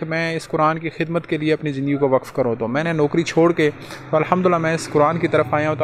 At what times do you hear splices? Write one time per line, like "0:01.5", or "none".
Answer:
none